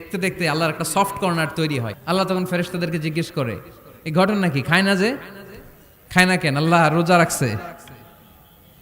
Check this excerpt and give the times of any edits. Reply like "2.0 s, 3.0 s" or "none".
1.9 s